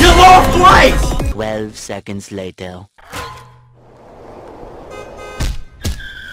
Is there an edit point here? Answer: yes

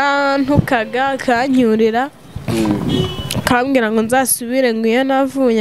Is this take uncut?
yes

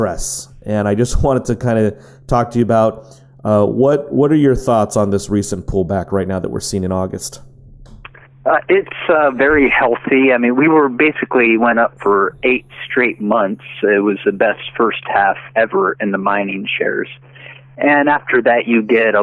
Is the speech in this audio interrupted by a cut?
yes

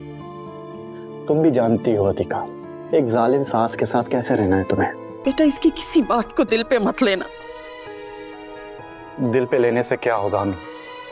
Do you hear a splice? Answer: yes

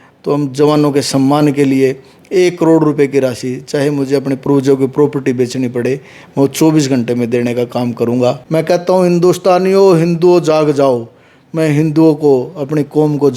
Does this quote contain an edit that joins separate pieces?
yes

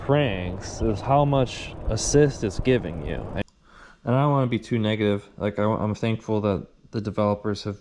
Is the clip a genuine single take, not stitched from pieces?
no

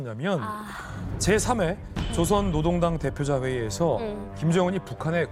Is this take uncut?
yes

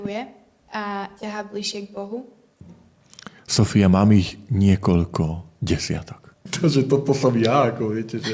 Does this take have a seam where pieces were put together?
yes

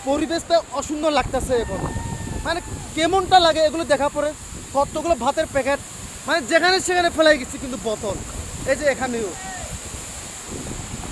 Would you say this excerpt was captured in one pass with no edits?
yes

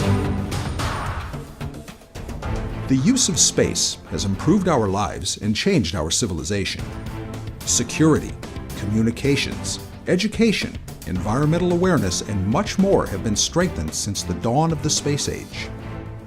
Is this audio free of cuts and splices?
yes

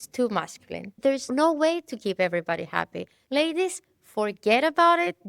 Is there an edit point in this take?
yes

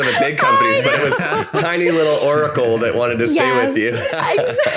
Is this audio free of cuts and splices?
yes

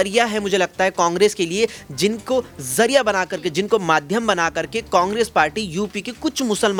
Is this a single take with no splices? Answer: yes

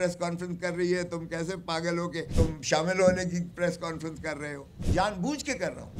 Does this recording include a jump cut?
yes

